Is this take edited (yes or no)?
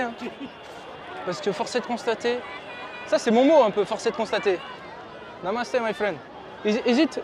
no